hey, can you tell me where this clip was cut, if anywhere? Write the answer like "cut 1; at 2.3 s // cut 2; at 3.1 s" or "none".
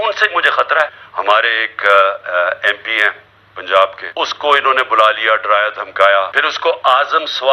cut 1; at 1.5 s // cut 2; at 4.3 s // cut 3; at 6.4 s